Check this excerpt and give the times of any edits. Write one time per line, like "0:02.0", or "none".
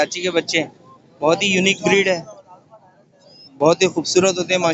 none